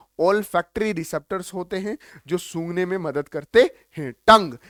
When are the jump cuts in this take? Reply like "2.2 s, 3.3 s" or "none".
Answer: none